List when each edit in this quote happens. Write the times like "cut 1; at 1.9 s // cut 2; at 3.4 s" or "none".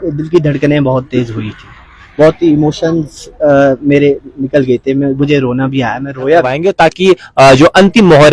cut 1; at 6.6 s